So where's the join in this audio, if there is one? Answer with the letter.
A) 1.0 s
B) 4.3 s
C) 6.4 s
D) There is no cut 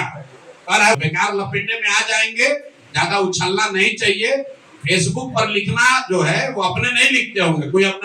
A